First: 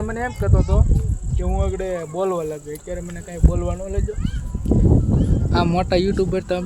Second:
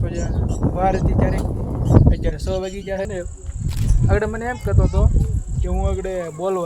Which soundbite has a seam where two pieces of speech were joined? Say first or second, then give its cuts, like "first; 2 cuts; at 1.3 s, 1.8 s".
second; 1 cut; at 3.1 s